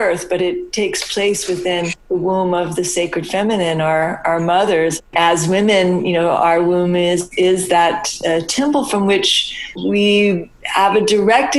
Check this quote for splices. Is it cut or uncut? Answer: cut